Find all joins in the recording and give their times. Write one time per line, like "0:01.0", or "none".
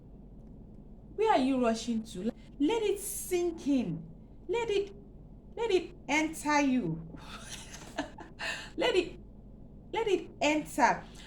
0:02.3